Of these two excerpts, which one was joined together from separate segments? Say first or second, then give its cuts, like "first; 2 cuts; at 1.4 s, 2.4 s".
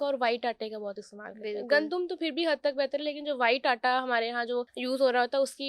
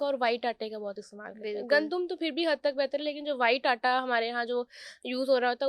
first; 1 cut; at 4.7 s